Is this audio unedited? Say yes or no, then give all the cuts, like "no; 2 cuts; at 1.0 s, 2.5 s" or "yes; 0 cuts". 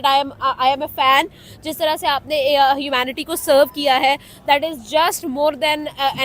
yes; 0 cuts